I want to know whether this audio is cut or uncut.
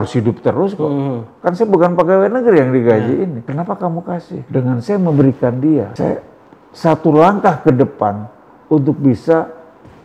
cut